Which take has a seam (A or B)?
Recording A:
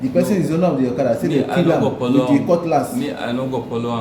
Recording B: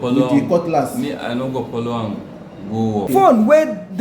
B